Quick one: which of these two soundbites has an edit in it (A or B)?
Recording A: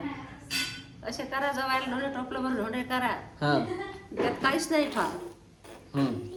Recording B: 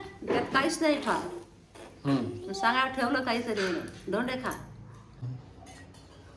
B